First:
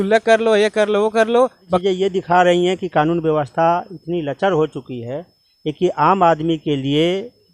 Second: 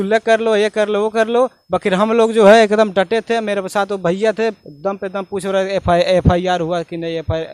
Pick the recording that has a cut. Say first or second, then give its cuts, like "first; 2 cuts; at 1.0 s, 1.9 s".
first; 1 cut; at 1.8 s